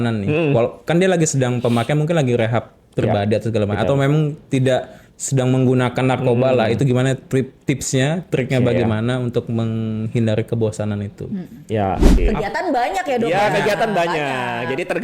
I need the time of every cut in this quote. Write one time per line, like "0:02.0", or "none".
0:12.2